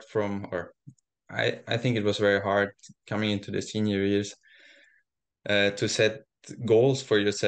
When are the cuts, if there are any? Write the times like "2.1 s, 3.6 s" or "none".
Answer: none